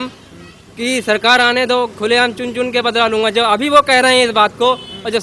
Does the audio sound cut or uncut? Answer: uncut